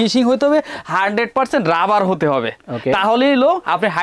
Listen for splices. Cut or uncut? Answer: uncut